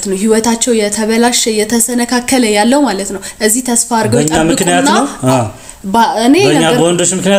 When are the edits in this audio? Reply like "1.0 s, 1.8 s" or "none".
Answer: none